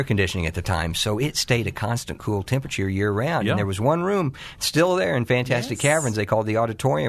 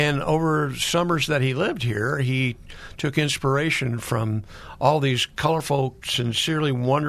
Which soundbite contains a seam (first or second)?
second